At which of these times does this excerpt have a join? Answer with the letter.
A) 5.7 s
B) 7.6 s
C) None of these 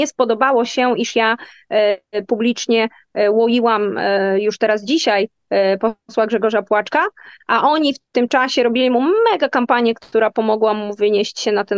C